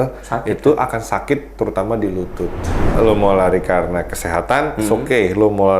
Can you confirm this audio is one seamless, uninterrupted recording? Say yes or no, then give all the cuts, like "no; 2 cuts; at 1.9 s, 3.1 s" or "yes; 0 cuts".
no; 1 cut; at 3.0 s